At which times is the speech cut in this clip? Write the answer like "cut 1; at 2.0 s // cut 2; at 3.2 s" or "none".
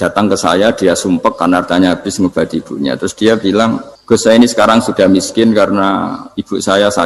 cut 1; at 3.9 s